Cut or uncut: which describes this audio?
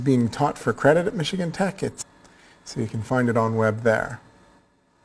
uncut